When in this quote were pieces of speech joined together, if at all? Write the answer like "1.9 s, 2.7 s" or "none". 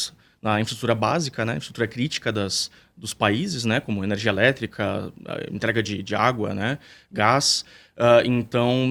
none